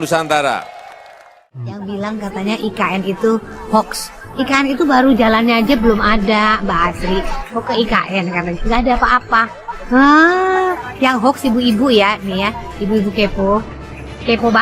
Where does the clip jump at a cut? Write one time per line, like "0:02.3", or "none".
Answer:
0:01.3